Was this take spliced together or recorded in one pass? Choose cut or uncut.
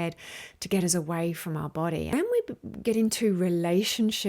cut